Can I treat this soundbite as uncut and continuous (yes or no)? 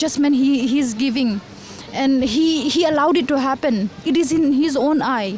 yes